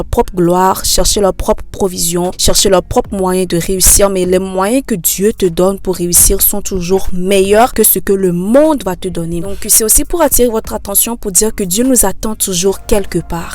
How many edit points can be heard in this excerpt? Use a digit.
1